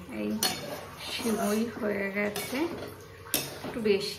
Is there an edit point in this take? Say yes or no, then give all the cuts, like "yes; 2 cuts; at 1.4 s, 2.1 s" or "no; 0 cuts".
no; 0 cuts